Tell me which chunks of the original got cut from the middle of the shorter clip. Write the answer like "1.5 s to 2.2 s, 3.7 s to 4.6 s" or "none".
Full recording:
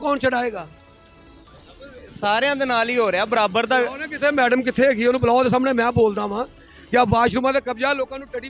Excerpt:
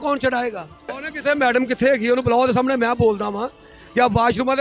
1.1 s to 4.0 s